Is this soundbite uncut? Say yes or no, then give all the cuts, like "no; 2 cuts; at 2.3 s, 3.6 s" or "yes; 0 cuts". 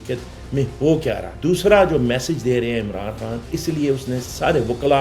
no; 2 cuts; at 1.3 s, 3.6 s